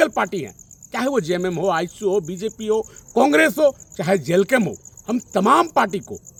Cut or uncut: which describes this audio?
uncut